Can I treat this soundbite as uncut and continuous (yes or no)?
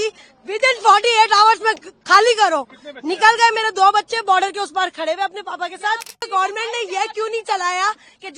no